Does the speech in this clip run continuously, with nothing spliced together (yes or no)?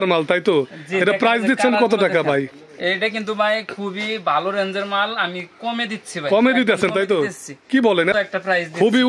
no